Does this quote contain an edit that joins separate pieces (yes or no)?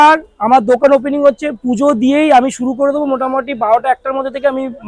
no